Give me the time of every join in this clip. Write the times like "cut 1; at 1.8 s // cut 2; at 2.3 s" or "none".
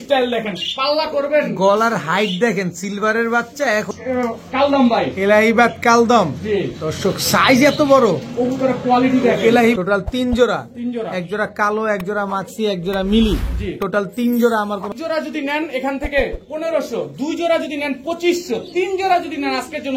cut 1; at 3.9 s // cut 2; at 9.8 s // cut 3; at 14.9 s